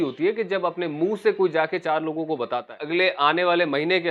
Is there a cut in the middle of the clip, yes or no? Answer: yes